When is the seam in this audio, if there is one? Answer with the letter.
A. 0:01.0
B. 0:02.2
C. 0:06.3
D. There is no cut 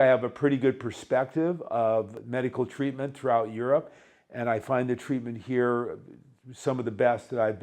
B